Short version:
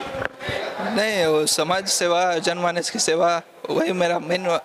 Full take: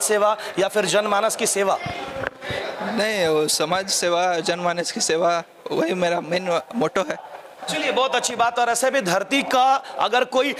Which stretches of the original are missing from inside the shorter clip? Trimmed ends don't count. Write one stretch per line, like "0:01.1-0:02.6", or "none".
none